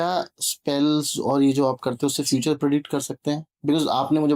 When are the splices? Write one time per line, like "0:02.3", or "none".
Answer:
none